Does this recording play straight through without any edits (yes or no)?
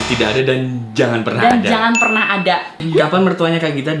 no